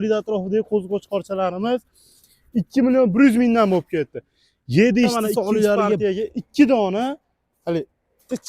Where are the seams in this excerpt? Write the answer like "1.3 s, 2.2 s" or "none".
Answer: 6.0 s